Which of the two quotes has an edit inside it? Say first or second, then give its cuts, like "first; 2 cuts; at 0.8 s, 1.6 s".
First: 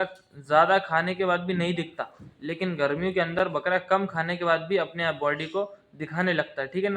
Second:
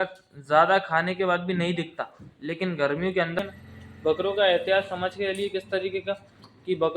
second; 1 cut; at 3.4 s